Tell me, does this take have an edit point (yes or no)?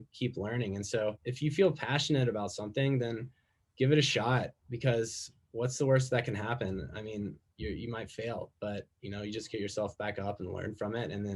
yes